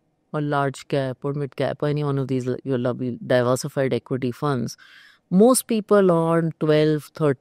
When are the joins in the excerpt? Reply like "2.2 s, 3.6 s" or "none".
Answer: none